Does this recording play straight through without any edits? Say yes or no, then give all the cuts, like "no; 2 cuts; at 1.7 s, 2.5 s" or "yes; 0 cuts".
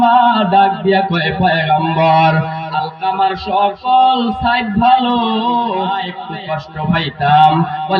no; 1 cut; at 6.1 s